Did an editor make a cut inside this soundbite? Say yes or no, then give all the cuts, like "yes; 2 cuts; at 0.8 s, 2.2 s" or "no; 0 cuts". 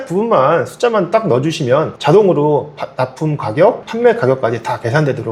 no; 0 cuts